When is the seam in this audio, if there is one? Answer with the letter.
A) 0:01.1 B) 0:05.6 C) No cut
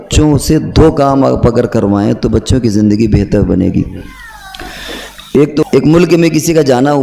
B